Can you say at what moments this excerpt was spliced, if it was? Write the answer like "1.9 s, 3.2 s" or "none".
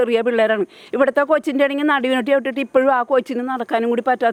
none